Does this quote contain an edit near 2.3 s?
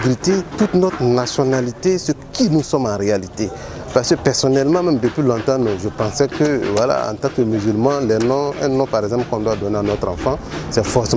no; 0 cuts

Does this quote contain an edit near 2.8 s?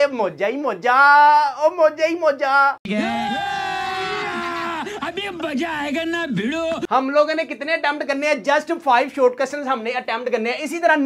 no; 0 cuts

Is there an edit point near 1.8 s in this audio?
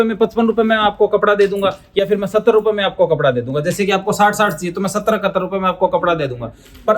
no; 0 cuts

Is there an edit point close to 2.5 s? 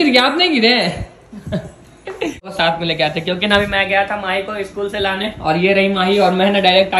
yes; 1 cut; at 2.5 s

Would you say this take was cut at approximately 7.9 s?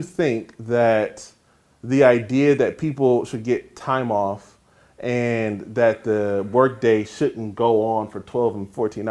no; 0 cuts

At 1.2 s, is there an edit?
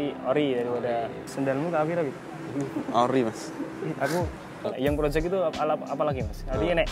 yes; 2 cuts; at 1.2 s, 4.6 s

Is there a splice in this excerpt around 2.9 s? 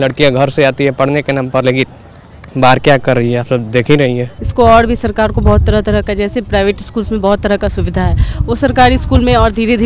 no; 1 cut; at 4.4 s

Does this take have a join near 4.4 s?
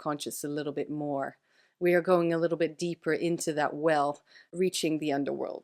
yes; 1 cut; at 4.4 s

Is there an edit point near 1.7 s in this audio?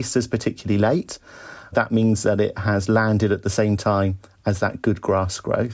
yes; 1 cut; at 1.7 s

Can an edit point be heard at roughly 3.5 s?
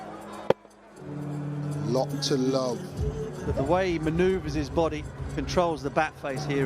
yes; 1 cut; at 3.5 s

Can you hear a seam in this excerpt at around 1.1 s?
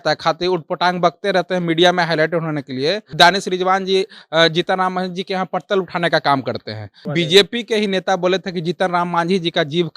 no; 2 cuts; at 3.1 s, 7.1 s

